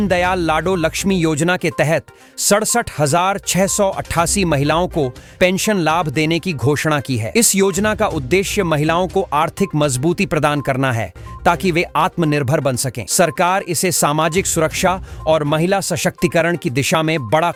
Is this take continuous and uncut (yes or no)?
yes